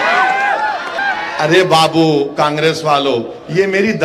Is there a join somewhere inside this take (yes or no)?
yes